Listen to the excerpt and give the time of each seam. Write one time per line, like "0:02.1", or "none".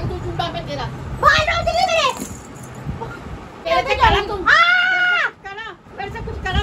0:03.6